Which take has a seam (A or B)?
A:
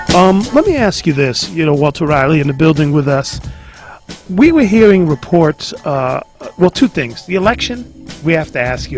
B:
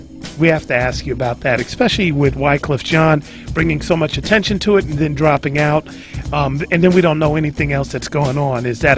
A